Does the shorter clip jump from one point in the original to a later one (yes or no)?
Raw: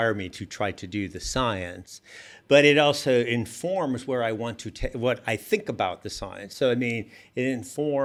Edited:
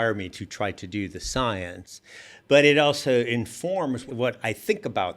yes